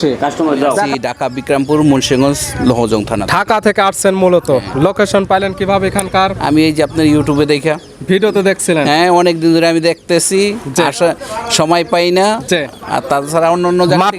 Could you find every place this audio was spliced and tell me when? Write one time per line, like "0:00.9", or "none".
0:00.9